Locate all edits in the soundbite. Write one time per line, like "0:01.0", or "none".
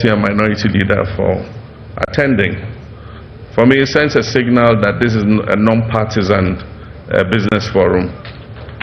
none